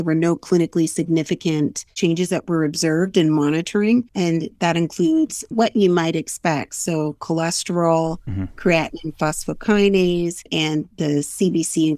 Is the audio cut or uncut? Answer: cut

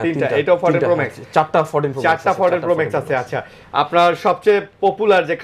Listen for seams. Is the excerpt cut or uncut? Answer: uncut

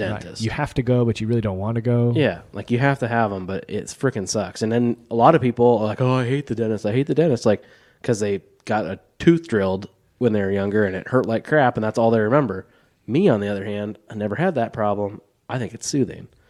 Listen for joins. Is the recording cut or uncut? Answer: uncut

